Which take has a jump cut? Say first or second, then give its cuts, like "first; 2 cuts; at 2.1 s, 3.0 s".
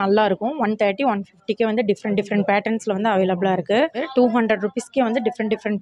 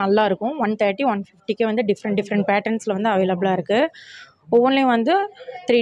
first; 1 cut; at 4.0 s